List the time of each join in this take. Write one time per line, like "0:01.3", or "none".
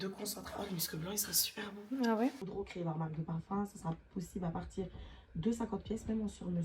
0:02.4